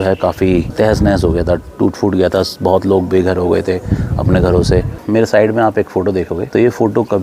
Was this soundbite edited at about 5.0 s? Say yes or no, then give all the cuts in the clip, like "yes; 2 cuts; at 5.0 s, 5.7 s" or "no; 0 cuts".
yes; 1 cut; at 5.0 s